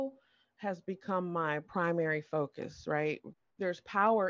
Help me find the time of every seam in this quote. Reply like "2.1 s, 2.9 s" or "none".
1.7 s, 3.4 s